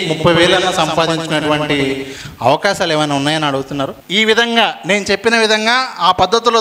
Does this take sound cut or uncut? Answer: cut